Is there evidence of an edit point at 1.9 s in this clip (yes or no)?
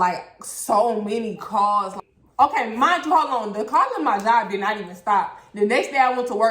yes